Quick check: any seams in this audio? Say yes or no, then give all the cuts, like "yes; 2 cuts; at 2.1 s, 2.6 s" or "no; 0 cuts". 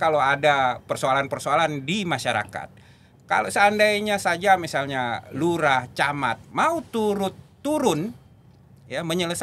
no; 0 cuts